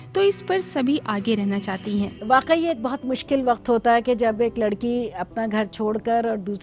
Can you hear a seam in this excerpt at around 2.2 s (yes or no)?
yes